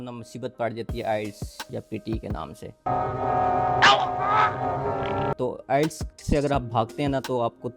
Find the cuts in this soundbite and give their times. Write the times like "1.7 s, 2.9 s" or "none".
5.3 s, 6.1 s